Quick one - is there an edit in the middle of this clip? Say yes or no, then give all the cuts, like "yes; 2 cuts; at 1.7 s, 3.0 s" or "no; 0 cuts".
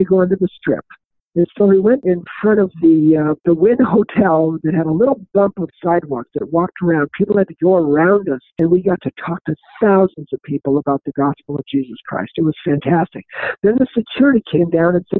yes; 3 cuts; at 2.0 s, 3.4 s, 8.5 s